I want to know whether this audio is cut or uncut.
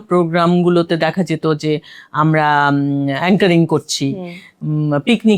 uncut